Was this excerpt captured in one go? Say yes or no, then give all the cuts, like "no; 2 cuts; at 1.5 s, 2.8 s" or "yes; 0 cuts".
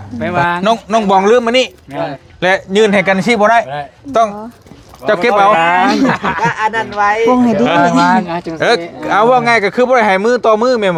yes; 0 cuts